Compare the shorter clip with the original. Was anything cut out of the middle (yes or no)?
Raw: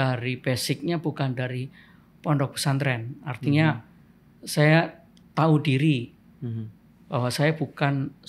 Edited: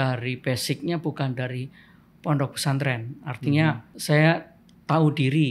yes